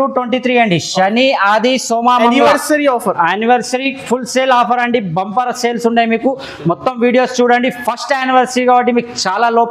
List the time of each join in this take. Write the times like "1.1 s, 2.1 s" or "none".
none